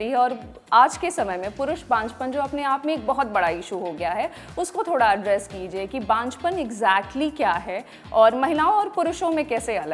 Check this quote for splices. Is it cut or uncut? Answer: uncut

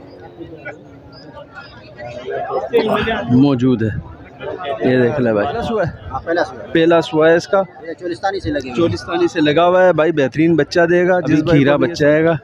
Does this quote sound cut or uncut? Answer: cut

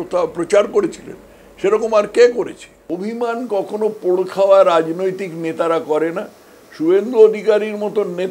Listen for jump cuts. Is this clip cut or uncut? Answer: cut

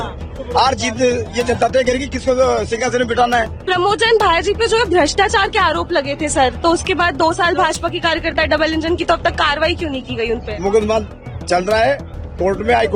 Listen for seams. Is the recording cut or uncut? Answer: cut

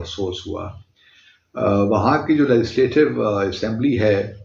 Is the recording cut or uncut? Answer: uncut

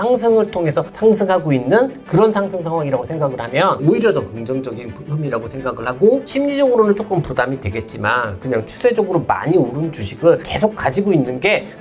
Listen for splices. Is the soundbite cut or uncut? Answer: cut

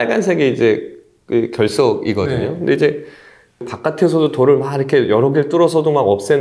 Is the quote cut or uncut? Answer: cut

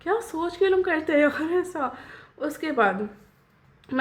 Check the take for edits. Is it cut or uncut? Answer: uncut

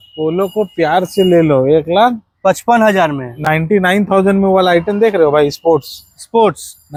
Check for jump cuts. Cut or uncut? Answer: uncut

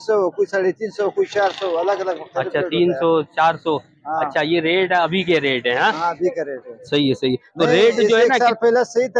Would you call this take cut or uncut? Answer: uncut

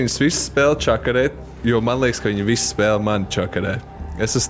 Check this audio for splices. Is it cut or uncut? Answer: uncut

